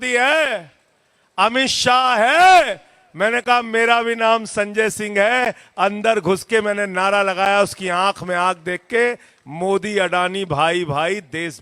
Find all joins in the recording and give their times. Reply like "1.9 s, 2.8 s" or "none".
none